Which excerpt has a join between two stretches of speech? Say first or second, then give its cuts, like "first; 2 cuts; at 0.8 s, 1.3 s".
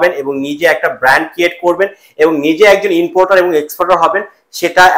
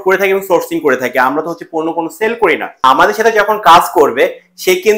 second; 1 cut; at 2.8 s